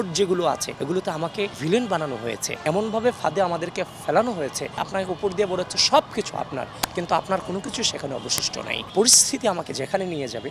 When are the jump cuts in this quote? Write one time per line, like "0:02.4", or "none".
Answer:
0:01.1
0:02.6
0:04.8
0:08.8

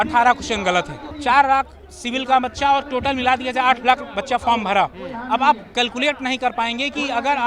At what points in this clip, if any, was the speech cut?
0:01.0

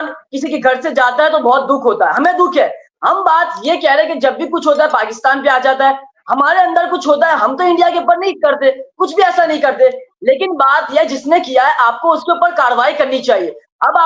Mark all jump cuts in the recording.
none

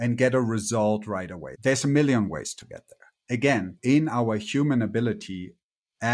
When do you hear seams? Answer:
0:01.4
0:03.7

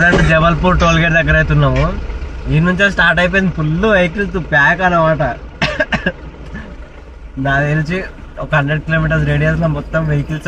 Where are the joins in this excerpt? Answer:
none

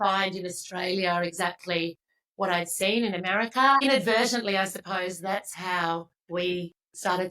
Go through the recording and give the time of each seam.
0:03.8
0:06.2

